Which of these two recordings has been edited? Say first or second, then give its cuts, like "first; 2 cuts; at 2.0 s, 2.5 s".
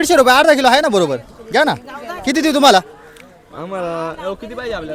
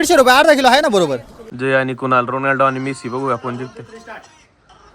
second; 1 cut; at 1.3 s